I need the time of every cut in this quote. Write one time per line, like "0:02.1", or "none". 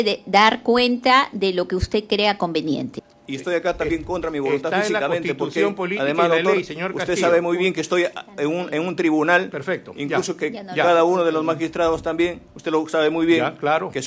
0:02.9